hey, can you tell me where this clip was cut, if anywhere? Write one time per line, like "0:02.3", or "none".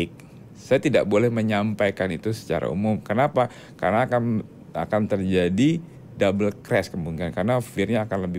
none